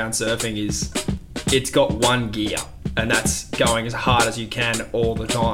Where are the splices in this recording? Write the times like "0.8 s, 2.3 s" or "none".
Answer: none

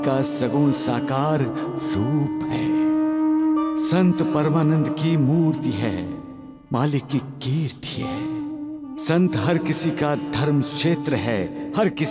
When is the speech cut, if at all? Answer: none

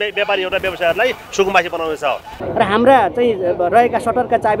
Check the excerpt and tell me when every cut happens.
2.4 s

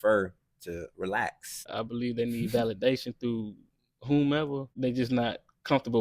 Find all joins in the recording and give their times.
1.7 s, 4.7 s

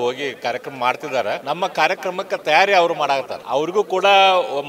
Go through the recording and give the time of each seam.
1.4 s, 3.4 s

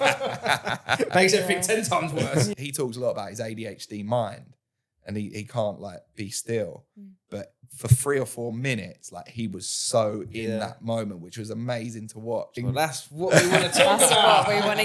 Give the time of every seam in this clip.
2.5 s, 12.6 s

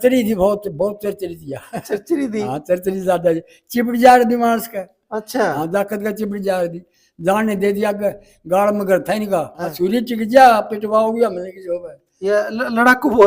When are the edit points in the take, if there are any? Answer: 9.6 s

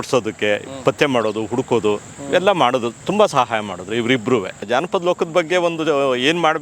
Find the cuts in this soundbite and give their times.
4.6 s

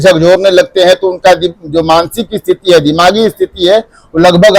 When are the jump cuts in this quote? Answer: none

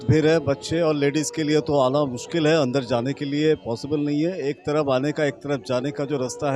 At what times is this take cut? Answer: none

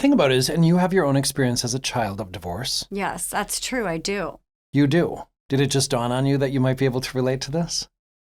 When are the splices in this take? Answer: none

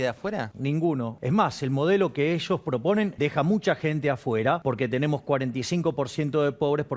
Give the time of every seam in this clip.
1.0 s, 3.1 s, 4.6 s

